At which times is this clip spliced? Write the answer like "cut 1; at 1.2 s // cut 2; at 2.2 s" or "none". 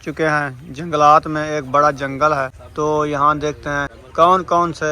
cut 1; at 2.6 s // cut 2; at 4.0 s

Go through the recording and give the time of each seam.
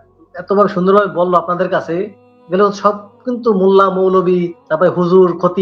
cut 1; at 4.6 s

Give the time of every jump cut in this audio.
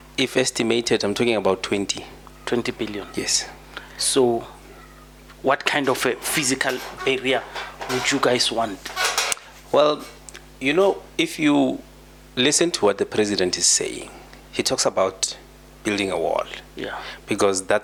none

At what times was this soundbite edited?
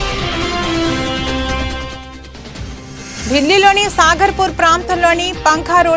cut 1; at 2.1 s

